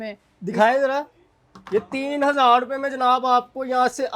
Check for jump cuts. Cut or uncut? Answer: uncut